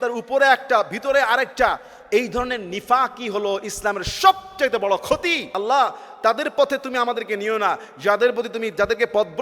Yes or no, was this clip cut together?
yes